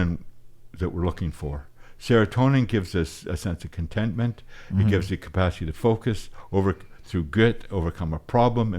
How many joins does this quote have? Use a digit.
0